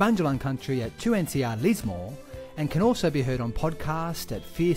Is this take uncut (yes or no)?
yes